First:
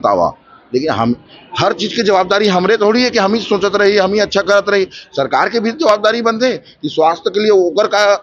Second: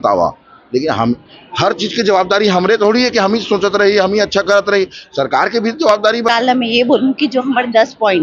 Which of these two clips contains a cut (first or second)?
second